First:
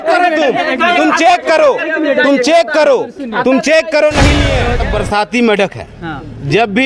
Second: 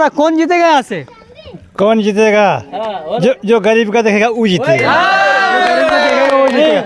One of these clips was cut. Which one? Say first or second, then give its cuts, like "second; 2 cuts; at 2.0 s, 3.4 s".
first; 1 cut; at 4.8 s